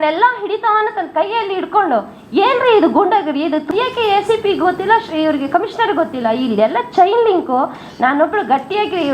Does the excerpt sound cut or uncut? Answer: cut